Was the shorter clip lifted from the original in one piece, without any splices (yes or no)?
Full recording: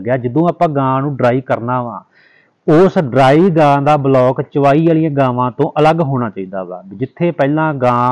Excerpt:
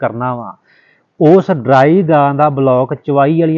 yes